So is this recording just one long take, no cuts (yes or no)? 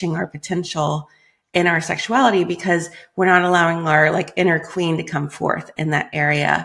yes